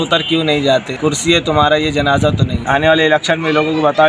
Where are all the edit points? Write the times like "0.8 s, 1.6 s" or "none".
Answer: 0.9 s, 2.6 s